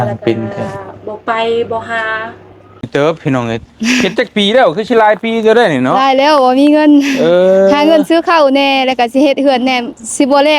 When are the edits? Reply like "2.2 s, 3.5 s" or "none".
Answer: 2.8 s